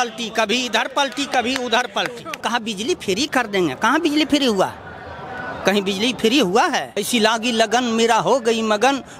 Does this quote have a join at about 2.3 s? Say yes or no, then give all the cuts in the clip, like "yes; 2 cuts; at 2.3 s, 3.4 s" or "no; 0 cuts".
yes; 2 cuts; at 2.3 s, 7.0 s